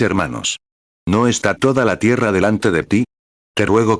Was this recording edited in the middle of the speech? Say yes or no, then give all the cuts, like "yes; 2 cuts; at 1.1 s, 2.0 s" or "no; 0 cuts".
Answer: yes; 1 cut; at 1.0 s